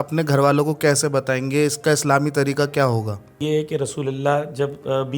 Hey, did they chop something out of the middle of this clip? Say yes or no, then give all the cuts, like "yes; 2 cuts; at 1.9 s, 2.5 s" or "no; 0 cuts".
yes; 1 cut; at 3.4 s